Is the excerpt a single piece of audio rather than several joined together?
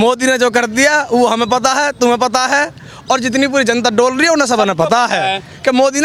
yes; 0 cuts

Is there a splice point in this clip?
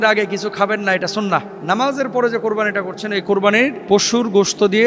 yes; 2 cuts; at 1.5 s, 3.8 s

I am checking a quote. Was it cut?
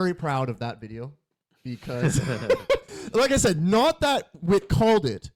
no; 0 cuts

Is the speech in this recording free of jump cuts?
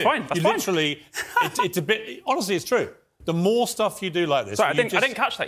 yes; 0 cuts

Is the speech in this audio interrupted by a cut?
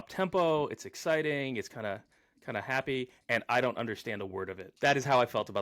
yes; 1 cut; at 4.6 s

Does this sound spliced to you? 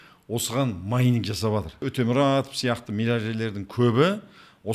yes; 1 cut; at 1.8 s

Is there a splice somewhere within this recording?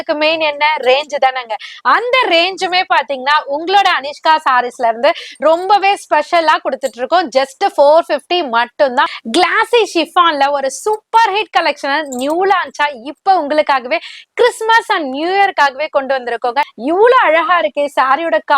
yes; 2 cuts; at 9.2 s, 16.7 s

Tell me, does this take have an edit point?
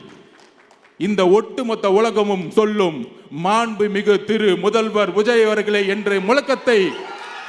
no; 0 cuts

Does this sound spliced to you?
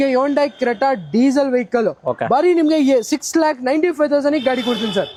no; 0 cuts

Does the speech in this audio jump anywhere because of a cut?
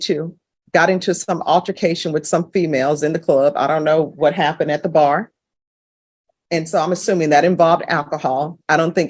no; 0 cuts

